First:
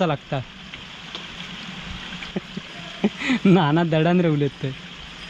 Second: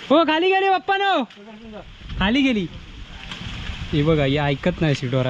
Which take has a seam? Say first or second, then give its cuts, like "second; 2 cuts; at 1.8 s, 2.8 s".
first; 1 cut; at 2.3 s